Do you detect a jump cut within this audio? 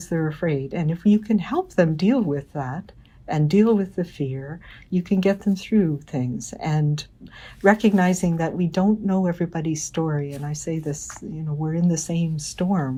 no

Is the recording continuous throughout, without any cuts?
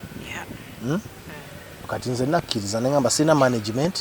no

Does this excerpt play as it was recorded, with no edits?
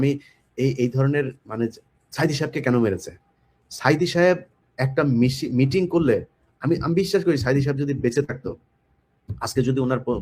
yes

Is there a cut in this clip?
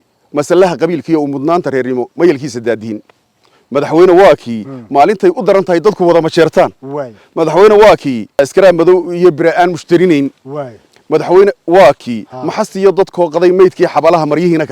no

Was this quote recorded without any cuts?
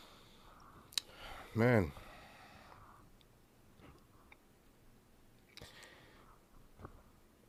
yes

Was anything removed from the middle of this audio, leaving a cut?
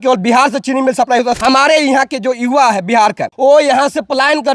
yes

